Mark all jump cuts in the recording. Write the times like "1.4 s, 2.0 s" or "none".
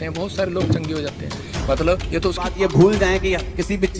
2.5 s